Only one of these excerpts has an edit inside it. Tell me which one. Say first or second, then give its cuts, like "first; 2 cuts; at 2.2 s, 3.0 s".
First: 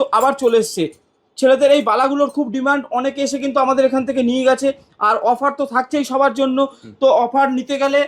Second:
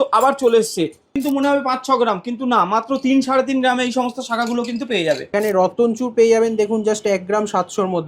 second; 2 cuts; at 1.2 s, 5.2 s